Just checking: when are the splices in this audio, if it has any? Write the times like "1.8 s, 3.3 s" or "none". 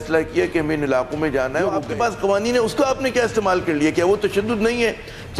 1.6 s